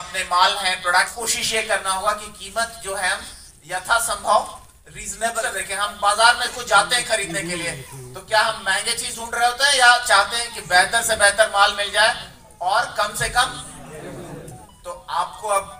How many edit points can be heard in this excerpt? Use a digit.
2